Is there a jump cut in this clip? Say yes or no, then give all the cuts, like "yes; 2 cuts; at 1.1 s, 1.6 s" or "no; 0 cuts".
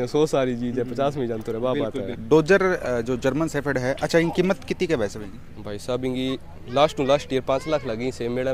no; 0 cuts